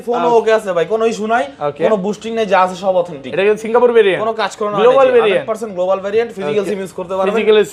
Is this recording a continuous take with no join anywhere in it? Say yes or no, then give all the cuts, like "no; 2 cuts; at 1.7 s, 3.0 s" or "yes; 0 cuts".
yes; 0 cuts